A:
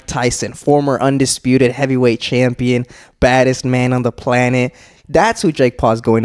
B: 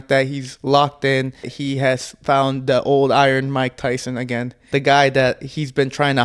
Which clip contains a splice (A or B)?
B